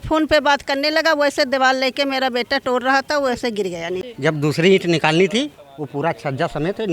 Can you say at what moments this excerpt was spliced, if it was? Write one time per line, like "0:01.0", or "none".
0:04.1